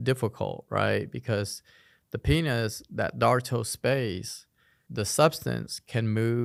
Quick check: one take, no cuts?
yes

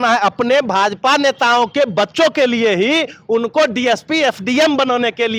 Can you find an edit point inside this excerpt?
no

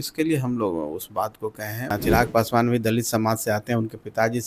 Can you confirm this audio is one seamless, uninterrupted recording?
no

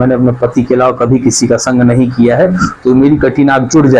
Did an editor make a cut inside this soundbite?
no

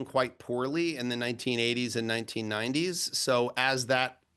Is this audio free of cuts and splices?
yes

